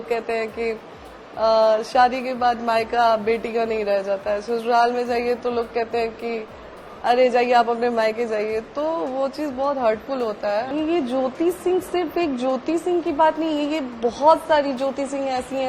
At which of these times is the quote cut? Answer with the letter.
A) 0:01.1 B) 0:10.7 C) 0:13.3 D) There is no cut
B